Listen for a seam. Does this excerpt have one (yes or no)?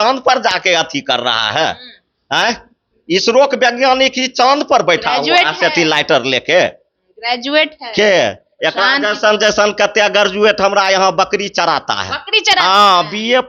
no